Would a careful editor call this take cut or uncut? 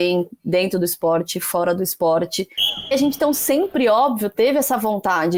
cut